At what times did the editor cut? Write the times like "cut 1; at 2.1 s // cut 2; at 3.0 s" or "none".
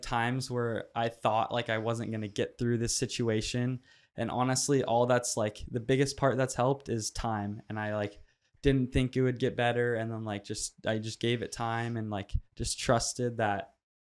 none

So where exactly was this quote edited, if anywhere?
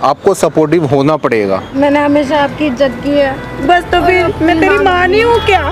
cut 1; at 1.7 s

